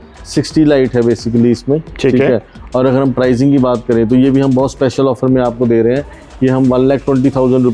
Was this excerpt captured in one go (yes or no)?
yes